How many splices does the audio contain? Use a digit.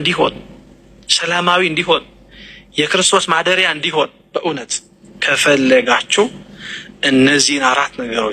0